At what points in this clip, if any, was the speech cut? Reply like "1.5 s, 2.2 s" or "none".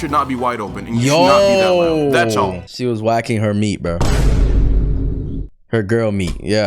2.7 s